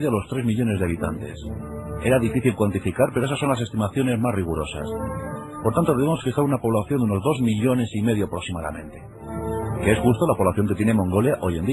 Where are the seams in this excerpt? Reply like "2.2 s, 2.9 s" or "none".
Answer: 9.1 s